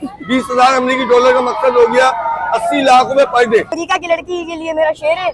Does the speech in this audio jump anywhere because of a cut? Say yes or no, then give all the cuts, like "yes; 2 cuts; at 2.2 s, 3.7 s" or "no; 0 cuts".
yes; 1 cut; at 3.8 s